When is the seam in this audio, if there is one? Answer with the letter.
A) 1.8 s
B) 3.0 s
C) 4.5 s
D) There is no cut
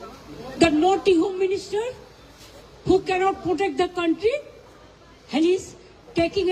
D